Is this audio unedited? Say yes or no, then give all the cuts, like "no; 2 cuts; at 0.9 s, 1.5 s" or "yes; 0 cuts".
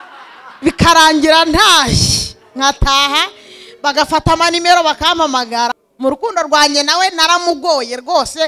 no; 1 cut; at 5.8 s